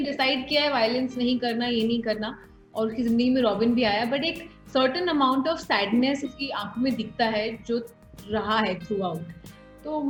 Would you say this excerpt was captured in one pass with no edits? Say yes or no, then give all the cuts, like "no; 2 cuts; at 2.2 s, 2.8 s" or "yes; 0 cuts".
yes; 0 cuts